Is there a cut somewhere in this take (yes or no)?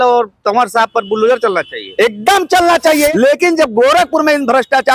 yes